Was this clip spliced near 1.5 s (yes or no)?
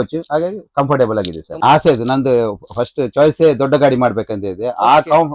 yes